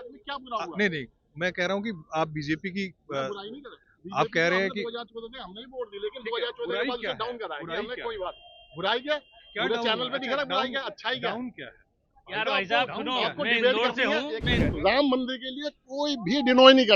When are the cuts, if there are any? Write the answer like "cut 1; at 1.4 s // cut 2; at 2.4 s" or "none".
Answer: cut 1; at 14.6 s